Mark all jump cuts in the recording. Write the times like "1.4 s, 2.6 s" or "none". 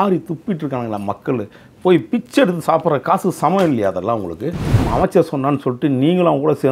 4.8 s